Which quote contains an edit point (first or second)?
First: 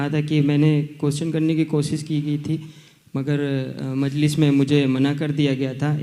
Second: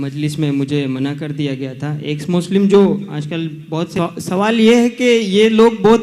second